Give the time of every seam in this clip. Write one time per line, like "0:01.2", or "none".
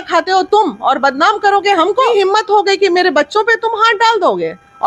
0:02.1